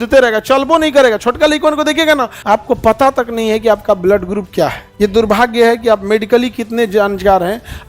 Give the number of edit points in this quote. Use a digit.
2